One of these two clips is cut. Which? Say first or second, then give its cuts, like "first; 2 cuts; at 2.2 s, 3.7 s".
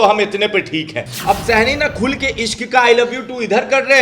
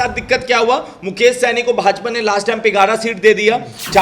first; 1 cut; at 1.1 s